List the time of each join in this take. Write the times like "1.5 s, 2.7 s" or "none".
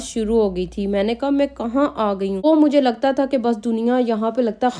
2.4 s